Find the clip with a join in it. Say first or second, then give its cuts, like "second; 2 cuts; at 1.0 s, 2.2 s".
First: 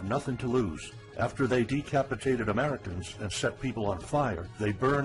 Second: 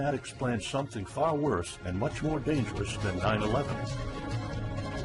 first; 1 cut; at 3.0 s